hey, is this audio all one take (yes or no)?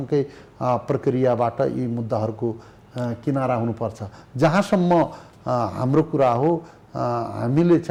yes